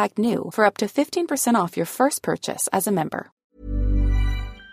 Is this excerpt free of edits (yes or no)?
no